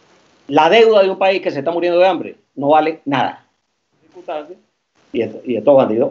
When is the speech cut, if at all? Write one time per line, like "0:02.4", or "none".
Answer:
0:04.2